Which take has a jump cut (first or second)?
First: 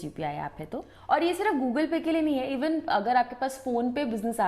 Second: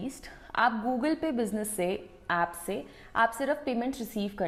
first